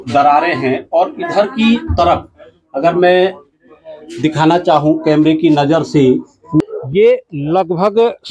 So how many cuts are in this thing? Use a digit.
1